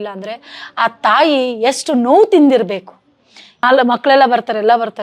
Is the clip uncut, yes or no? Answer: no